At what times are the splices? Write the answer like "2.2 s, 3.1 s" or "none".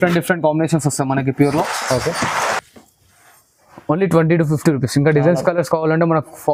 none

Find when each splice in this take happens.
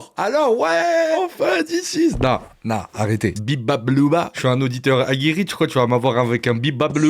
1.2 s, 3.4 s, 4.3 s

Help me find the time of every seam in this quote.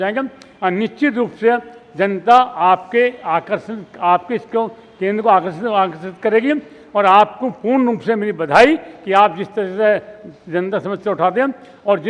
none

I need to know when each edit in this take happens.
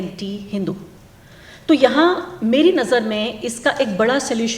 none

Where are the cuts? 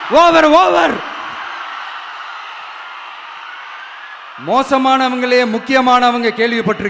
4.2 s

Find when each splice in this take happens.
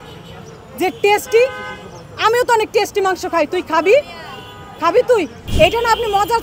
5.4 s

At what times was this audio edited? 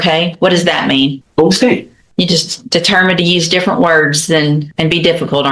1.2 s, 2.0 s, 4.7 s

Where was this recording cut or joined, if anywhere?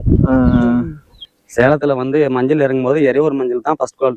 1.4 s

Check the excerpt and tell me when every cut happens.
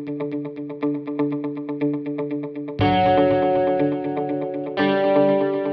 none

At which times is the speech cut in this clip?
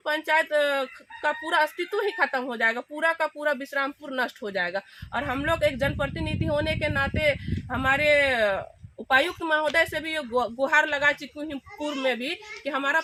none

